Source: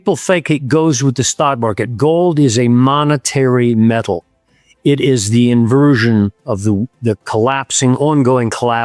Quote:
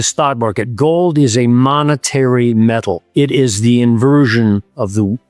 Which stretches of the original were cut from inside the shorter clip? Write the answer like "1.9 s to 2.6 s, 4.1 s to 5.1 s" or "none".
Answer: 4.2 s to 4.7 s

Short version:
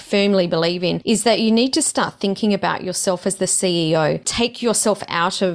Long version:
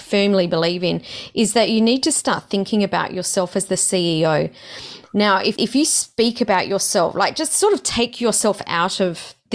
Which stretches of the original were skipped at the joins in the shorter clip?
1.0 s to 1.3 s, 4.6 s to 7.9 s

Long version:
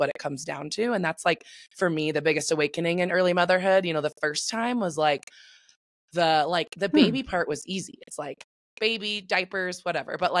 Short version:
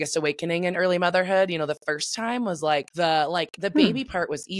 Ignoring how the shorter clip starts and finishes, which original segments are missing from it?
5.2 s to 6.1 s

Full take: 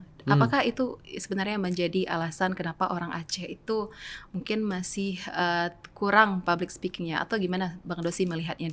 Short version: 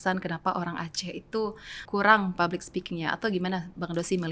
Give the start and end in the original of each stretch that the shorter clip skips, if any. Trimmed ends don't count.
4.1 s to 5.8 s

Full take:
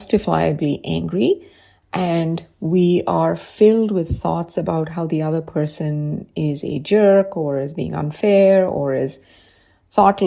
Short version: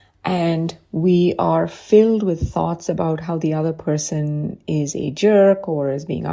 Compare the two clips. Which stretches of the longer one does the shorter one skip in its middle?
none

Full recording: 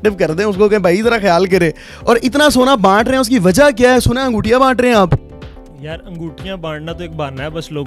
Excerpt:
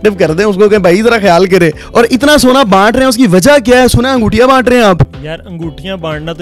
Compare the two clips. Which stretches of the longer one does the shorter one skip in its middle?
1.8 s to 1.9 s, 5.3 s to 5.8 s

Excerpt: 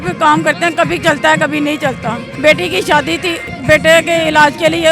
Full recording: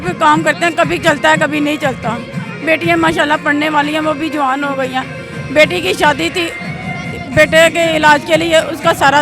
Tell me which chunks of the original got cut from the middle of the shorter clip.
2.3 s to 5.4 s, 6.6 s to 7.2 s

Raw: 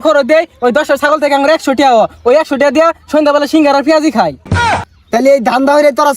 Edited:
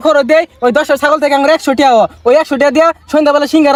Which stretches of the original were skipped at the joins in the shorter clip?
none

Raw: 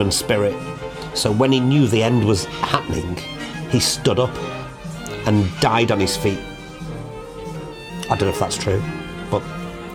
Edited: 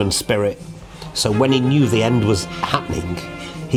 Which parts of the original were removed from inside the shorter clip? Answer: none

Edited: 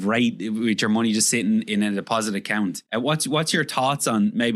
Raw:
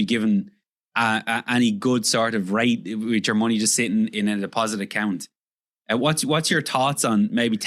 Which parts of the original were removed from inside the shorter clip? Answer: 5.3 s to 5.8 s

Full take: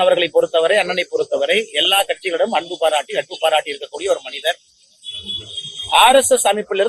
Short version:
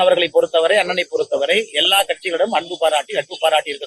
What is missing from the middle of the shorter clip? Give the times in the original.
none

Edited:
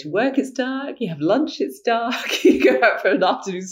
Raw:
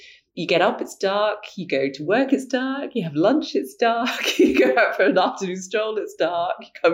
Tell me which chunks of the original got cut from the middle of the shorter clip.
none

